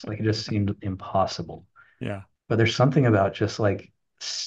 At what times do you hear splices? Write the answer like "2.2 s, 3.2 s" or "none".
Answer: 2.3 s